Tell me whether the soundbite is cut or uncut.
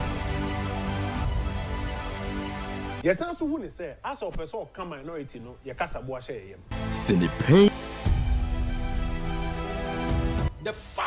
cut